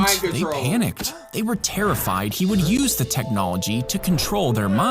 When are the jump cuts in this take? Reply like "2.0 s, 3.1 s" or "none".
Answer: 2.8 s